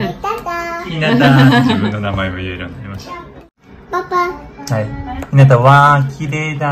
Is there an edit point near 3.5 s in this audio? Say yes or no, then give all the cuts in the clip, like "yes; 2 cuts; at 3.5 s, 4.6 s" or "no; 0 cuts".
yes; 1 cut; at 3.5 s